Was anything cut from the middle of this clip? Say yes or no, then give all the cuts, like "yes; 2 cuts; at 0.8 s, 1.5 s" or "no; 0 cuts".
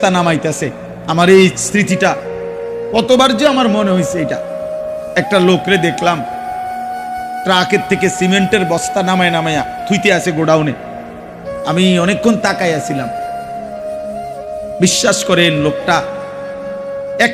no; 0 cuts